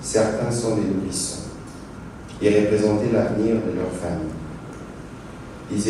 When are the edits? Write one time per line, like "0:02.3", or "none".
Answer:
0:01.8